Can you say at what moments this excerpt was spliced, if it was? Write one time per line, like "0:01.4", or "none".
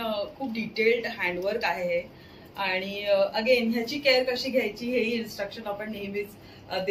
none